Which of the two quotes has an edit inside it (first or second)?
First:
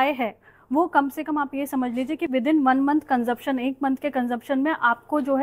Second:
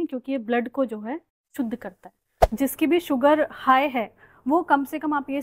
second